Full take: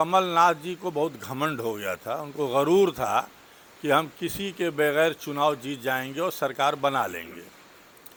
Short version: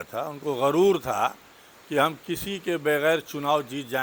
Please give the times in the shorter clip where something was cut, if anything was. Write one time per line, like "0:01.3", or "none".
none